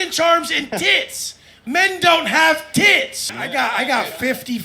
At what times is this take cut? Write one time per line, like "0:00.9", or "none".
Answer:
0:03.1

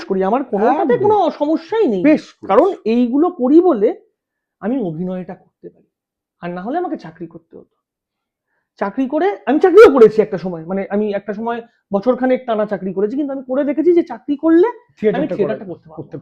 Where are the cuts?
none

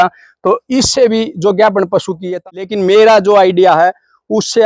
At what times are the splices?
0:02.3

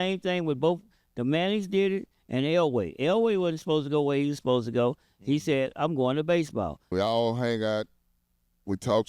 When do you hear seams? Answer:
0:06.8

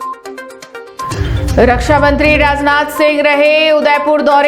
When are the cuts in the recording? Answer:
0:01.1

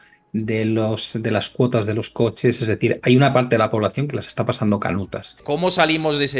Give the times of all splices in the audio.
0:05.4

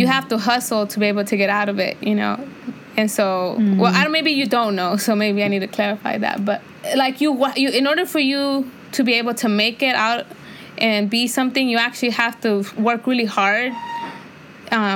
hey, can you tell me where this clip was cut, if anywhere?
none

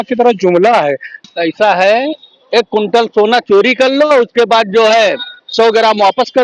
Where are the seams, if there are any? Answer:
0:01.1

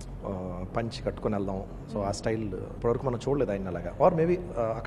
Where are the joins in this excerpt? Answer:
0:02.7

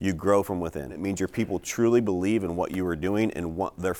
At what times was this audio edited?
0:01.0

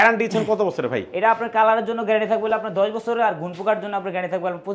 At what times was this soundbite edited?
none

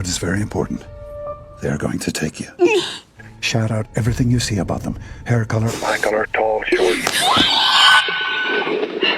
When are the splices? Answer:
0:01.5
0:07.0

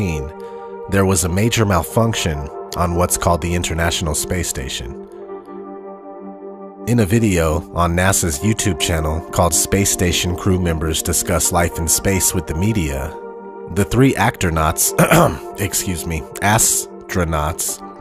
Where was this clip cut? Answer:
0:11.4

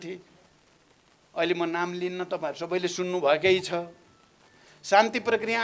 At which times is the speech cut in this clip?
none

